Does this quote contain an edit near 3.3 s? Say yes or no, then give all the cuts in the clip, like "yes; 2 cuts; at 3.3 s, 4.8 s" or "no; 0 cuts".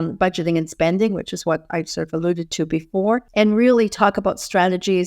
yes; 1 cut; at 3.3 s